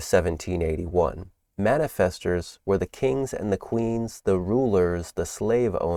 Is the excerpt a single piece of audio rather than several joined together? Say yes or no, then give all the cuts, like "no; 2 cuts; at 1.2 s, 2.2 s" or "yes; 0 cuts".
yes; 0 cuts